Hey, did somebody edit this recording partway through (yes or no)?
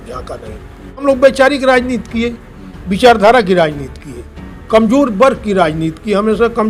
yes